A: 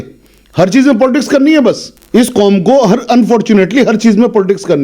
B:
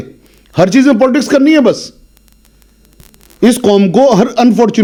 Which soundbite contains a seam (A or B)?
A